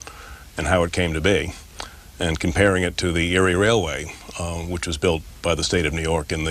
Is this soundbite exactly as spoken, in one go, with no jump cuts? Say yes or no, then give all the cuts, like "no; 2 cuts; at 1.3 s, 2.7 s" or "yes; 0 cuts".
no; 1 cut; at 2.4 s